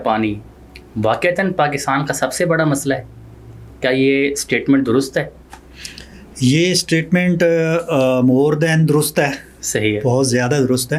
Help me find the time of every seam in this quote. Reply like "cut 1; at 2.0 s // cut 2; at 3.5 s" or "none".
none